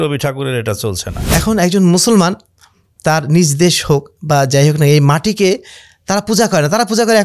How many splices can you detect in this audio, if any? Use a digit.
1